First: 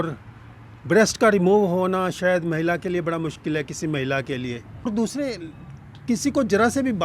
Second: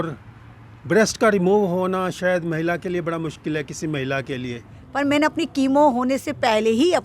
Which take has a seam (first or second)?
second